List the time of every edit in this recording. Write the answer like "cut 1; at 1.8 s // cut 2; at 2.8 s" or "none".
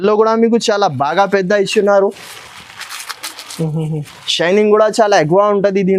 none